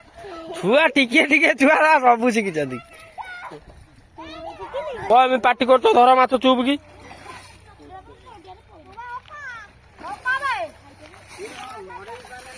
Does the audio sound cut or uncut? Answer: cut